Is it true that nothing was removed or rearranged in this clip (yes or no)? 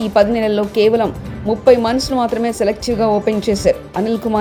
yes